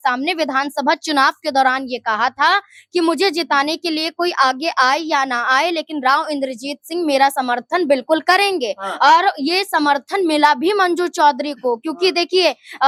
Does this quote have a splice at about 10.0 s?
no; 0 cuts

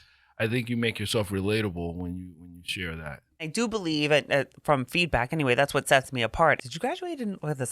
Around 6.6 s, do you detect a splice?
yes; 2 cuts; at 3.5 s, 6.6 s

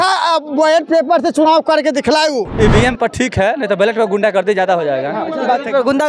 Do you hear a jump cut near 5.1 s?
no; 1 cut; at 2.5 s

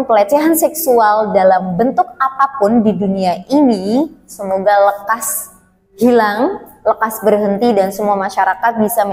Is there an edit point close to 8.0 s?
no; 0 cuts

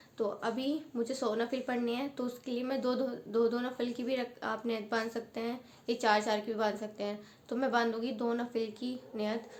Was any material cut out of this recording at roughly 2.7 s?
no; 0 cuts

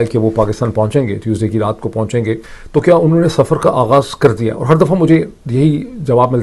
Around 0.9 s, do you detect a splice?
no; 1 cut; at 2.5 s

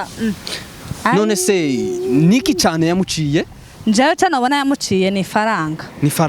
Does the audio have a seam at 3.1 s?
no; 0 cuts

